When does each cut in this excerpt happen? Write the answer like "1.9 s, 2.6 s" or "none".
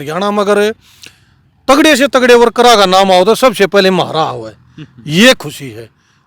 none